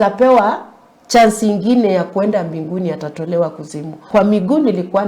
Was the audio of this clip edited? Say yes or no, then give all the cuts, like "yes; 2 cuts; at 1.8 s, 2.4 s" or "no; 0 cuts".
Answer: yes; 1 cut; at 4.1 s